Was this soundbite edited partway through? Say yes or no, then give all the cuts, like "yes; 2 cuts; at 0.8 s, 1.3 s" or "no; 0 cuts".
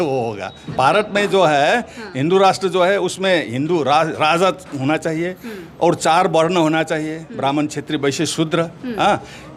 no; 0 cuts